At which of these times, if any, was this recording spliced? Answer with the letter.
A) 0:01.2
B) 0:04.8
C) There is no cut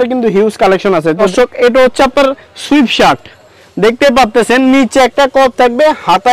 A